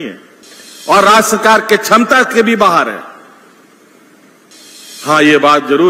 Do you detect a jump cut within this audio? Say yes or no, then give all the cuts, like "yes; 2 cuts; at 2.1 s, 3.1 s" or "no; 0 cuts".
yes; 1 cut; at 4.5 s